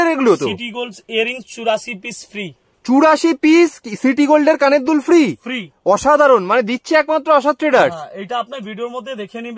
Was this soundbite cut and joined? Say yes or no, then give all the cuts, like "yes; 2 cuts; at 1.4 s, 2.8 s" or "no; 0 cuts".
no; 0 cuts